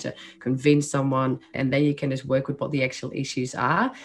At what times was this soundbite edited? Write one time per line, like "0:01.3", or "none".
0:01.5